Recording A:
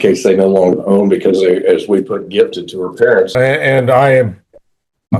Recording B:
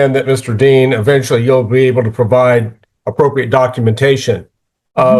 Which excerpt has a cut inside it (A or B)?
A